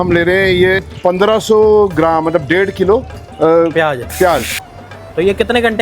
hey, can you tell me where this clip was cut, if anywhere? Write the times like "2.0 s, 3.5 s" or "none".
0.9 s, 4.8 s